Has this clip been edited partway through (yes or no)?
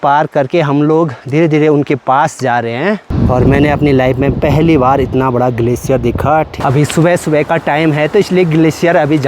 yes